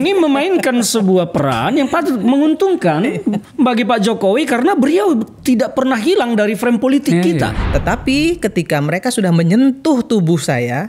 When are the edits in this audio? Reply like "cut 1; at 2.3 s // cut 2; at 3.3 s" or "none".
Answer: cut 1; at 7.6 s